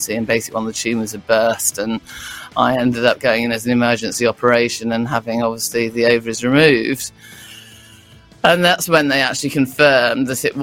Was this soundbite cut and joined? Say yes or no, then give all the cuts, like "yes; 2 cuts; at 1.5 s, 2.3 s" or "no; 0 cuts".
no; 0 cuts